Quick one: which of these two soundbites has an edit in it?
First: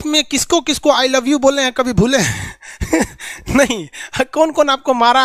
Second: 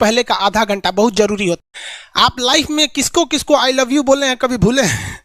second; 1 cut; at 1.6 s

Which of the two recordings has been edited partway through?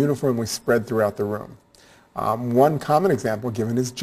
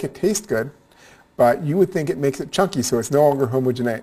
first; 1 cut; at 3.1 s

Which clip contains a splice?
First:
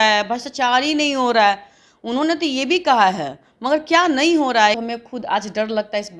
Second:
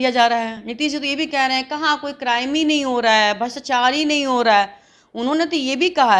first; 1 cut; at 4.8 s

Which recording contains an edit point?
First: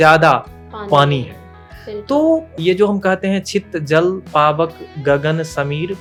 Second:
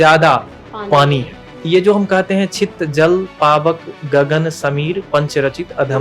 second; 1 cut; at 1.6 s

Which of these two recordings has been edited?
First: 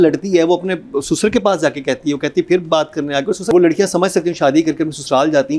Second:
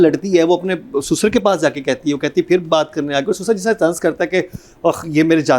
first; 1 cut; at 3.5 s

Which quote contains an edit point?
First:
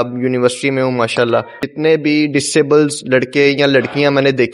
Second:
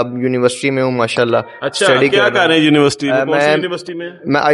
first; 1 cut; at 1.6 s

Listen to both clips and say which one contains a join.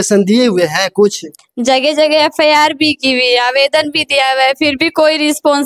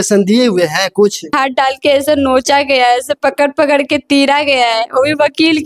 second; 1 cut; at 1.3 s

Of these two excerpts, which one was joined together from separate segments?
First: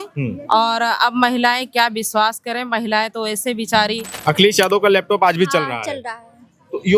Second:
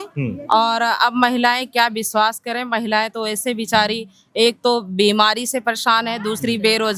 first; 1 cut; at 4.1 s

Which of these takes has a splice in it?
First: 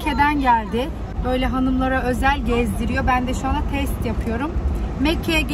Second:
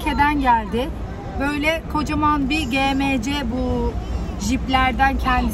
first; 1 cut; at 1.1 s

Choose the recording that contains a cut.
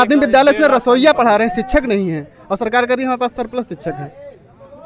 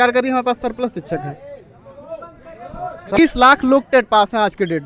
second; 1 cut; at 3.1 s

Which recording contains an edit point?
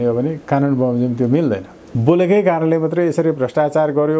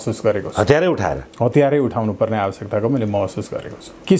first; 1 cut; at 1.8 s

